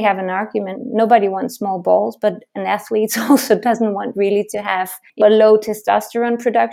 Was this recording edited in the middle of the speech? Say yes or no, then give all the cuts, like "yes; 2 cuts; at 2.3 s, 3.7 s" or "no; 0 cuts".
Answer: yes; 1 cut; at 5.2 s